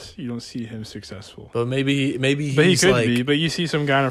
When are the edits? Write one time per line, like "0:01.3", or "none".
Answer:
none